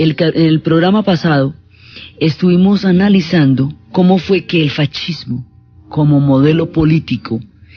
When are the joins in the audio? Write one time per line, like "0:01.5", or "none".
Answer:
none